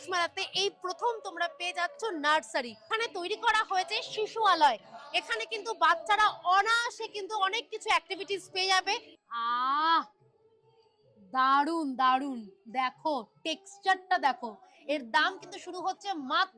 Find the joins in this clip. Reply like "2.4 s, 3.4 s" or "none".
2.9 s, 9.2 s